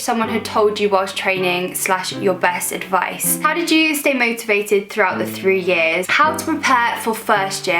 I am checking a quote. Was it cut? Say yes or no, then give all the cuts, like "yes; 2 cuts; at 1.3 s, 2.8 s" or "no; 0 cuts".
yes; 2 cuts; at 3.3 s, 6.1 s